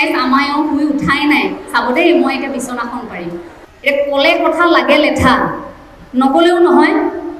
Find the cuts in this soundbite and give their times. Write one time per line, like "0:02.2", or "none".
0:03.6